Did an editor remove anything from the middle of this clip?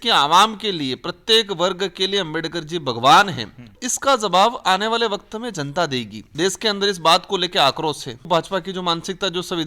yes; 3 cuts; at 3.8 s, 6.2 s, 8.3 s

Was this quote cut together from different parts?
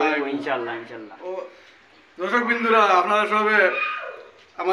yes; 1 cut; at 1.0 s

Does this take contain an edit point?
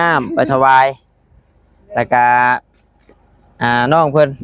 no; 0 cuts

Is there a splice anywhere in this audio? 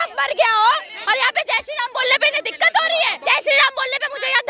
yes; 2 cuts; at 1.0 s, 3.2 s

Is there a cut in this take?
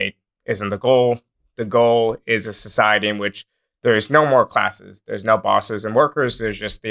no; 0 cuts

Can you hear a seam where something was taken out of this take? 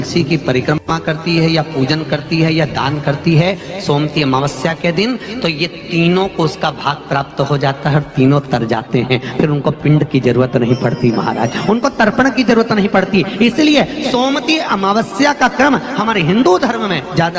no; 0 cuts

